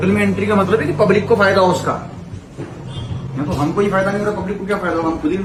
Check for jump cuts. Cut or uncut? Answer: uncut